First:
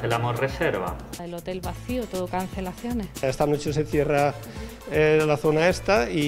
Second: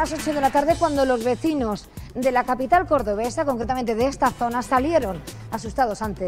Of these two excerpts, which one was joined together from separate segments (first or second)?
first